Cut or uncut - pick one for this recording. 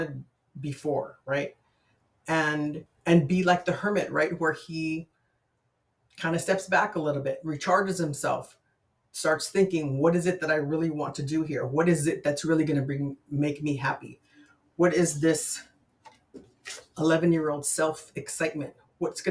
cut